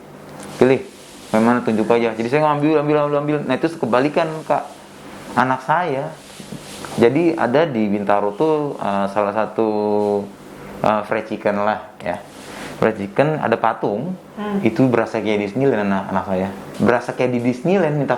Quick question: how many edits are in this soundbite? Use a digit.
1